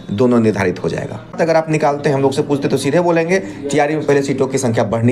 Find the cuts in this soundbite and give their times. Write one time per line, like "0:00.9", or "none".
0:01.4